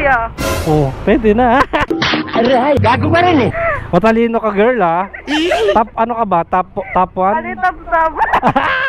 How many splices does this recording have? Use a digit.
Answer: 1